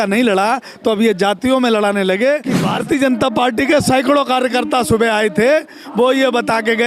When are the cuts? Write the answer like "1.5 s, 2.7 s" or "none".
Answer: 2.7 s